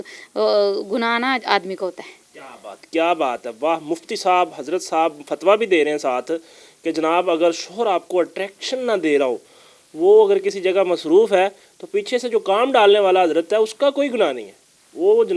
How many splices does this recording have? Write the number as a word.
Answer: zero